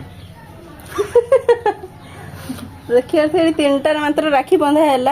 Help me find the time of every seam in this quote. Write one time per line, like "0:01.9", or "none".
none